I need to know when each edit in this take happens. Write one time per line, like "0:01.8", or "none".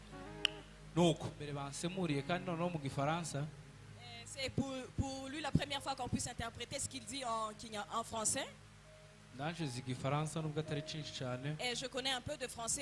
0:01.7

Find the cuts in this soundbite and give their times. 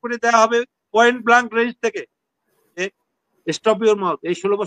0:02.8

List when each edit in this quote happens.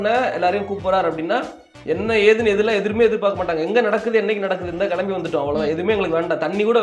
none

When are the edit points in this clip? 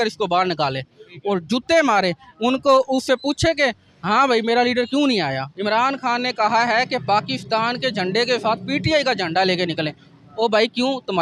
0:05.5

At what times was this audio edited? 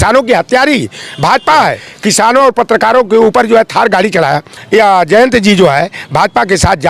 0:01.9
0:04.5

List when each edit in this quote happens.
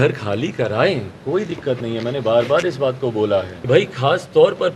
0:03.5

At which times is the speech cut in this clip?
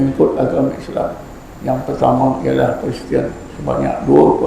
none

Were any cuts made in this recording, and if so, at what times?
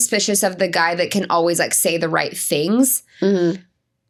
none

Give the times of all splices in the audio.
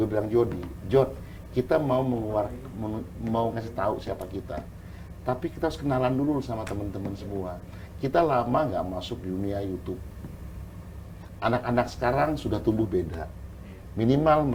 none

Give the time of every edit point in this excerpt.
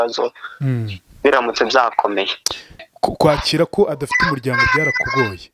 0:02.8

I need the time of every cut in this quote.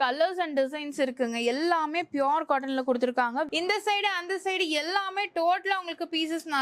0:03.5

